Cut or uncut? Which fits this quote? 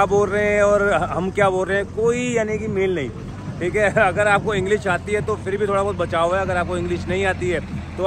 uncut